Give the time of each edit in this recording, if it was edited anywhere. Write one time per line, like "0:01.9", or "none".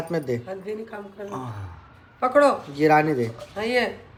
none